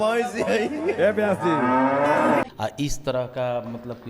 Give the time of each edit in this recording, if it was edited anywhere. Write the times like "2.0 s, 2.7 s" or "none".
2.5 s